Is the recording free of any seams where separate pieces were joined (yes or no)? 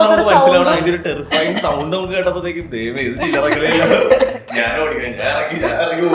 yes